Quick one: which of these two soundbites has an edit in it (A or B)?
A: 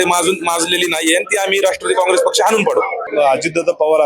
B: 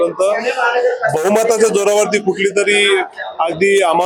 A